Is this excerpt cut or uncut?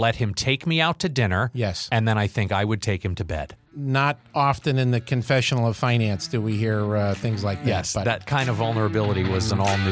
cut